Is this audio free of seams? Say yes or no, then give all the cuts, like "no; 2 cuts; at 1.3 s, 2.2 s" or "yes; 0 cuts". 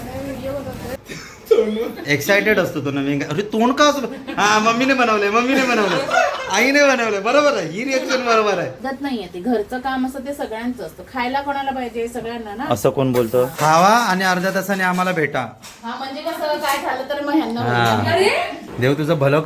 no; 4 cuts; at 0.9 s, 8.8 s, 13.5 s, 18.6 s